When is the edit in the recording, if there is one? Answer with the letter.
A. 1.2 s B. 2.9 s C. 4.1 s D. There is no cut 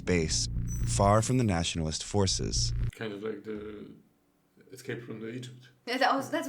B